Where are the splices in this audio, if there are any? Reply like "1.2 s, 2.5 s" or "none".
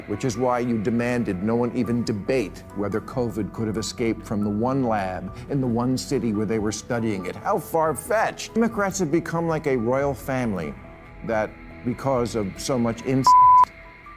none